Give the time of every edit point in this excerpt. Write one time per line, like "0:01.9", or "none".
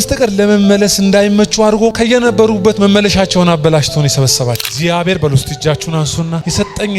0:04.7